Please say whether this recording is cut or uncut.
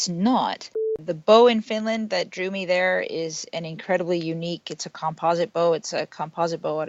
cut